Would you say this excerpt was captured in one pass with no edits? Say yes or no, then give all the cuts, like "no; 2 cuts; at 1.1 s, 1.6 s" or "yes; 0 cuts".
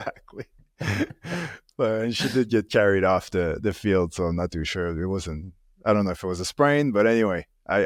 yes; 0 cuts